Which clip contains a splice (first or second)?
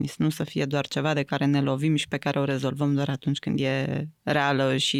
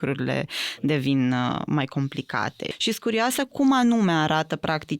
second